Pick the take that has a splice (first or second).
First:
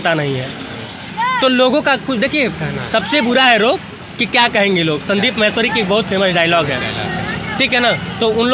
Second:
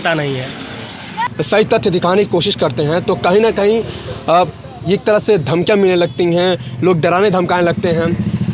second